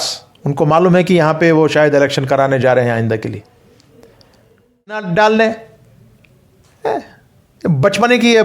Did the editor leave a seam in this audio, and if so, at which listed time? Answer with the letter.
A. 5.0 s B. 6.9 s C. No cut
A